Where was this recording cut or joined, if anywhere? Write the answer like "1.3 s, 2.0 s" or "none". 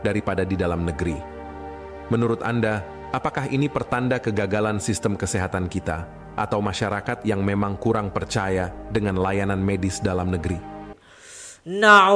11.0 s